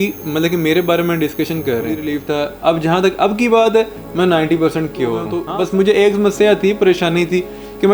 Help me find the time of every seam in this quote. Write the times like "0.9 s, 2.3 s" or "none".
2.1 s, 5.4 s

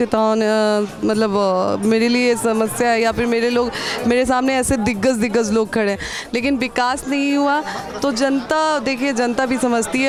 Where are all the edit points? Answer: none

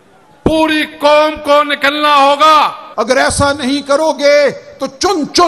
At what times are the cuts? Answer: 2.8 s

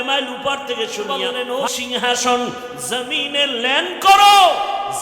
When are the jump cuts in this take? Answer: 1.1 s

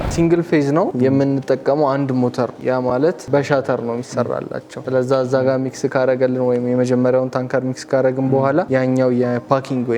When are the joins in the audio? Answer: 0.9 s

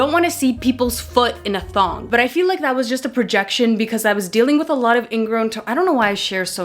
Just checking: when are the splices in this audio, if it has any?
2.0 s

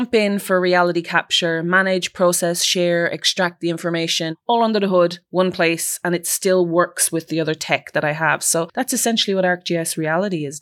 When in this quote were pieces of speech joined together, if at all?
4.4 s, 8.7 s

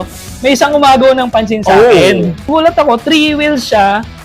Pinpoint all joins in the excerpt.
2.5 s

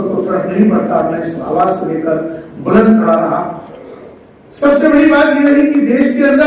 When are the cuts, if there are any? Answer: none

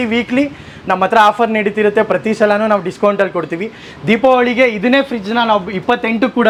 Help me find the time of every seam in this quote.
none

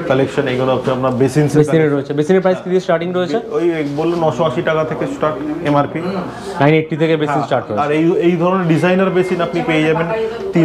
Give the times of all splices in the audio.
none

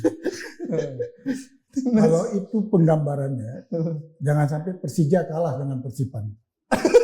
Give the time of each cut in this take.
1.5 s

